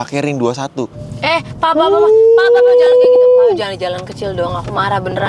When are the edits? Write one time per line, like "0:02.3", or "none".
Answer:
0:01.0